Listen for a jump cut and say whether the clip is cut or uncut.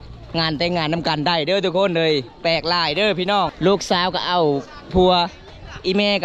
cut